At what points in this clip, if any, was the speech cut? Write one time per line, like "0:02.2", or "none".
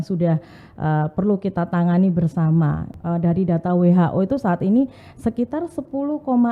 0:02.9